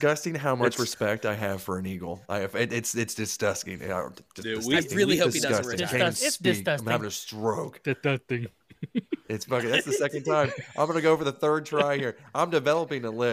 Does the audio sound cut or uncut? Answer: uncut